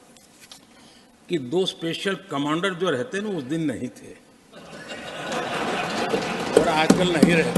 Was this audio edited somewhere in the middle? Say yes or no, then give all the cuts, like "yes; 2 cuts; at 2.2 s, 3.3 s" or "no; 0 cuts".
no; 0 cuts